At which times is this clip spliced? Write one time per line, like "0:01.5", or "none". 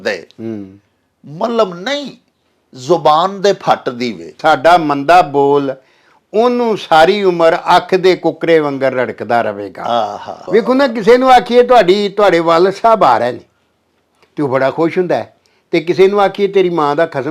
0:04.3
0:10.4